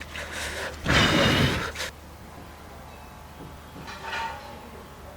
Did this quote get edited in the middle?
yes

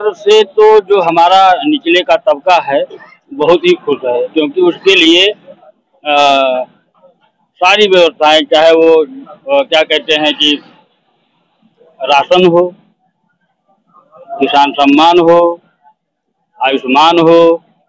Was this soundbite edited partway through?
no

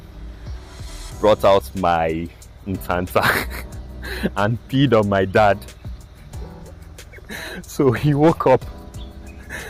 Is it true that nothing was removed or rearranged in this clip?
yes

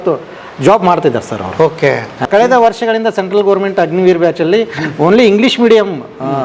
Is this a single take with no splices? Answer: no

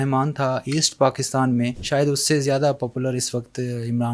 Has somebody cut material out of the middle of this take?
yes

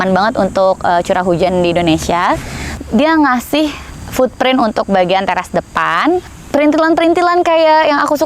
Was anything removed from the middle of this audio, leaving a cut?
yes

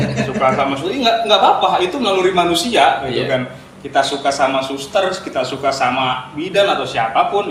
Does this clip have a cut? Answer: no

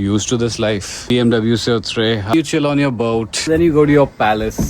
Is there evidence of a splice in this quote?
yes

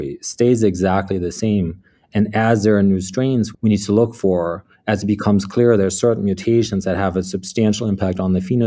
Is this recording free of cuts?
no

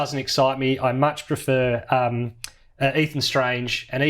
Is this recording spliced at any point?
no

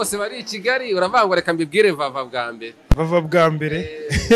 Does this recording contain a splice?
no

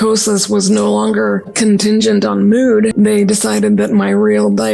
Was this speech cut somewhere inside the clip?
yes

